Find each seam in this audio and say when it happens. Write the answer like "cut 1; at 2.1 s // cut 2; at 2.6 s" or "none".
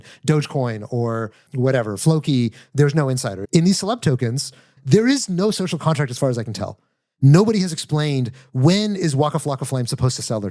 cut 1; at 1.4 s // cut 2; at 3.4 s // cut 3; at 4.7 s